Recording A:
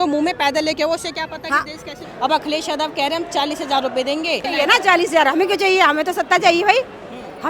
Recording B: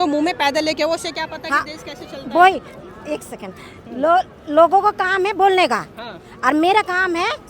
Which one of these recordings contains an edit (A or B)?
A